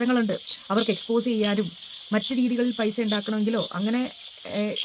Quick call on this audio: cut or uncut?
uncut